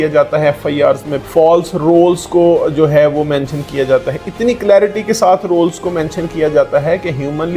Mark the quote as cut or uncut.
uncut